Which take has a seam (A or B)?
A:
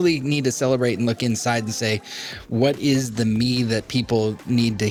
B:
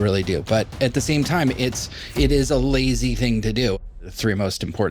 B